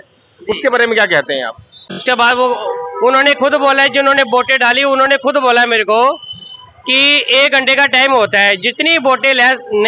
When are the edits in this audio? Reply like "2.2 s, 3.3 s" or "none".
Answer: 2.0 s